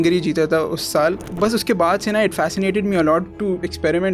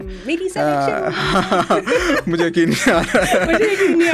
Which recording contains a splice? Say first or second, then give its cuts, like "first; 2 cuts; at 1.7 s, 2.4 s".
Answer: first; 1 cut; at 1.3 s